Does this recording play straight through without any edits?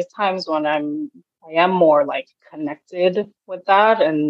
no; 1 cut; at 2.4 s

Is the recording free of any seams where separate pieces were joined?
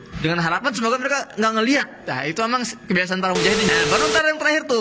no; 1 cut; at 3.7 s

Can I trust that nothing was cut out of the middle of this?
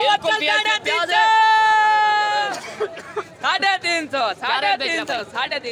yes; 0 cuts

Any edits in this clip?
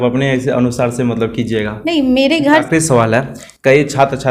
yes; 1 cut; at 2.7 s

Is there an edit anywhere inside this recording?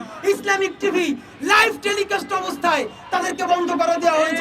no; 0 cuts

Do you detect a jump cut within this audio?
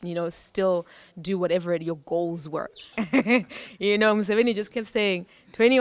yes; 1 cut; at 2.9 s

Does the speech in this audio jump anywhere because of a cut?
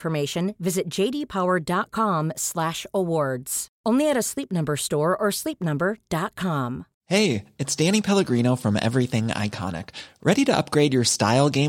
yes; 1 cut; at 7.0 s

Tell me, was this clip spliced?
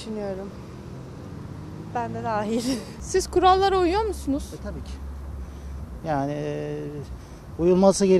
no; 0 cuts

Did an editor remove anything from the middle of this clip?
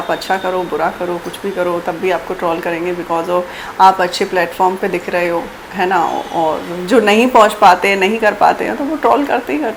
no; 0 cuts

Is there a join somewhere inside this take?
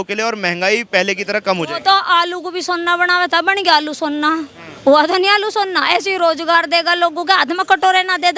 no; 0 cuts

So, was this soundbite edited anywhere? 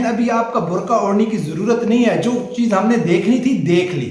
no; 0 cuts

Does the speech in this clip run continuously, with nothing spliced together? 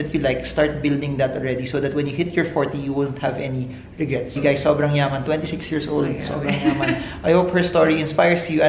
no; 1 cut; at 4.4 s

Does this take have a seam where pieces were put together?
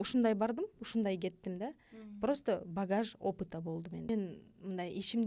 yes; 1 cut; at 4.1 s

